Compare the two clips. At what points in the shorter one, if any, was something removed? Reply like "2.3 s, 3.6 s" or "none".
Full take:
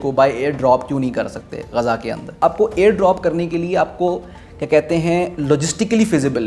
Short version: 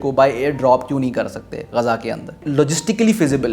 2.4 s

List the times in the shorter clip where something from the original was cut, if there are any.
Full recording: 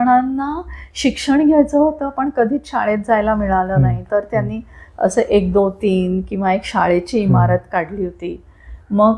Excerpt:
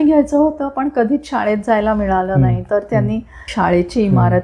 3.5 s

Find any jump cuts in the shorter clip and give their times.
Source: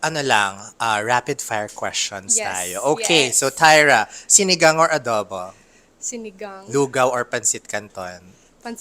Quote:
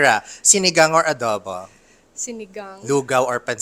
none

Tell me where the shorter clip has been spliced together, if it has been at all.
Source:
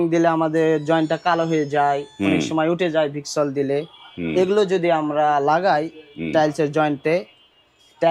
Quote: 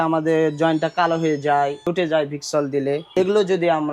1.9 s, 3.1 s

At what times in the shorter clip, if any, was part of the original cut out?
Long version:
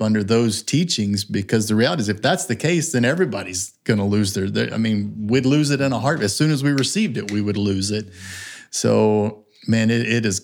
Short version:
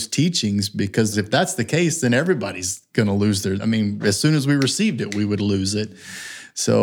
1.1 s, 3.9 s

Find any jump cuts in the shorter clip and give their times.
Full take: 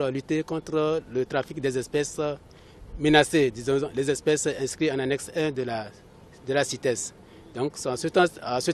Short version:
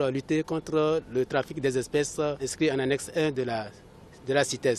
2.5 s

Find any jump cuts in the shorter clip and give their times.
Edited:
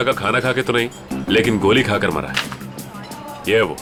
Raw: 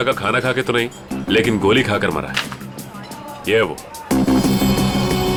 none

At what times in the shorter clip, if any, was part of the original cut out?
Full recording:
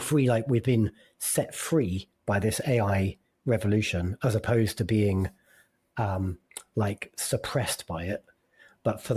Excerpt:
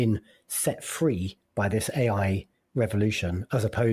none

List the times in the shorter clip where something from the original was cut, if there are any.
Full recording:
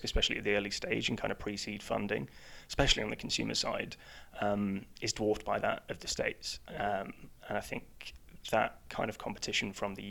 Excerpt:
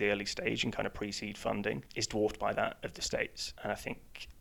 1.9 s, 3.4 s

